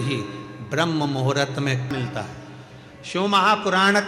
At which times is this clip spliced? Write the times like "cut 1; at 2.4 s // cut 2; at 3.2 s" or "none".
cut 1; at 1.9 s

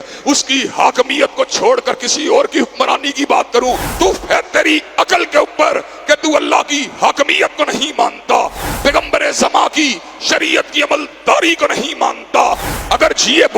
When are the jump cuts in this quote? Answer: cut 1; at 3.9 s // cut 2; at 8.6 s // cut 3; at 12.7 s

